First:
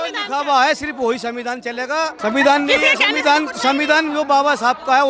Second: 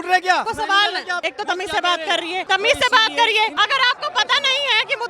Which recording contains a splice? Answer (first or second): second